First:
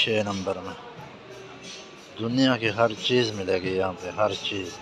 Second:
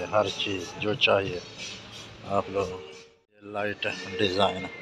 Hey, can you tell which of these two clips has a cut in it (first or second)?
second